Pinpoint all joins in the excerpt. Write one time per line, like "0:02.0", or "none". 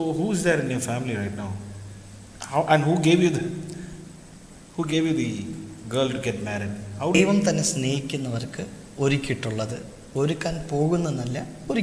0:07.2